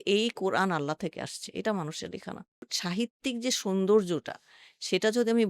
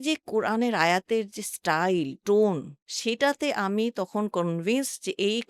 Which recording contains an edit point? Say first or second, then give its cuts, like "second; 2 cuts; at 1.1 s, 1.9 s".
first; 1 cut; at 2.6 s